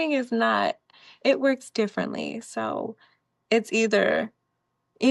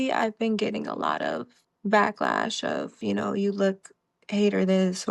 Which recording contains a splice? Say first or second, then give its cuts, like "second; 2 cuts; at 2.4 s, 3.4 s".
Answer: second; 2 cuts; at 1.5 s, 3.0 s